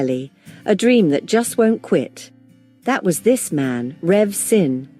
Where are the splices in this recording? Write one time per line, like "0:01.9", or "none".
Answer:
0:03.5